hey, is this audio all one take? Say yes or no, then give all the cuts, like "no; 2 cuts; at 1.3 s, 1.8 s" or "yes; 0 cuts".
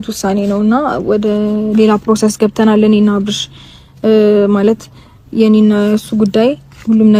yes; 0 cuts